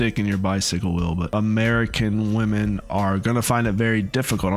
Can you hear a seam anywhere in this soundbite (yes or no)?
yes